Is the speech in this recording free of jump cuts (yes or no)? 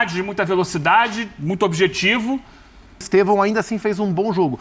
no